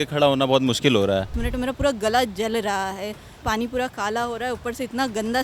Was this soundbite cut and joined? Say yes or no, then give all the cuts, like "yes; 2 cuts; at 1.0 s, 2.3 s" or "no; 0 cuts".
yes; 2 cuts; at 1.4 s, 3.4 s